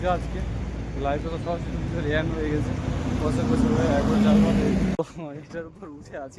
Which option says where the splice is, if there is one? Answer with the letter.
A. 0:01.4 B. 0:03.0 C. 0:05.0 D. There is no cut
C